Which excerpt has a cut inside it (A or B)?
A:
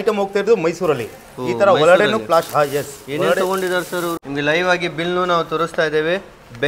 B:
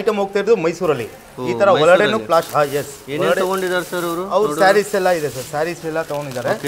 A